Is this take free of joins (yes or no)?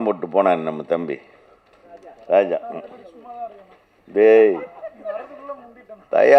yes